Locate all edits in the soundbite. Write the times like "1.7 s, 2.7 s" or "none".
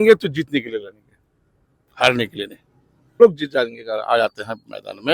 3.2 s